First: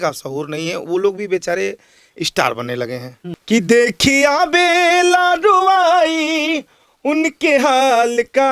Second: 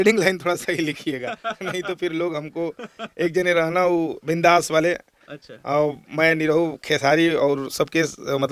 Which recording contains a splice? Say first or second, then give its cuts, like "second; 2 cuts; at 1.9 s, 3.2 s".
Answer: first; 1 cut; at 3.2 s